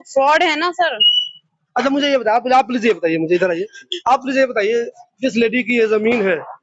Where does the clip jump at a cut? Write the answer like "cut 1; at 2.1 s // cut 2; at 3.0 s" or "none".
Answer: none